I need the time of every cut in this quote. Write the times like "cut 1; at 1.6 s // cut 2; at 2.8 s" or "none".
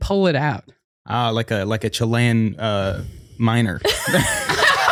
none